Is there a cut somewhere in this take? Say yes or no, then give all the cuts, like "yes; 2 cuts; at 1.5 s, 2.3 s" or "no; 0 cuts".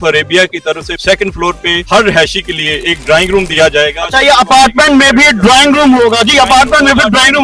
no; 0 cuts